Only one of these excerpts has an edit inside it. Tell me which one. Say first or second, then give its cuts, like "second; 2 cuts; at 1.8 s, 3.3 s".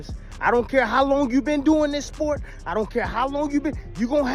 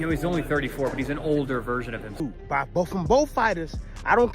second; 1 cut; at 2.2 s